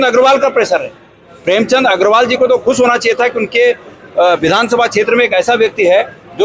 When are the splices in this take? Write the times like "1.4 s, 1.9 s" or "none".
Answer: none